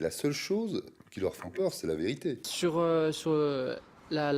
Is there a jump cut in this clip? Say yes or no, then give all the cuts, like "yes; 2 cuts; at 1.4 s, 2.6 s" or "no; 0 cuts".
yes; 1 cut; at 2.5 s